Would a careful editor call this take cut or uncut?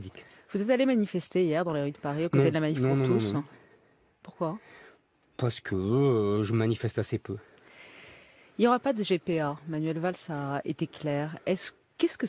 cut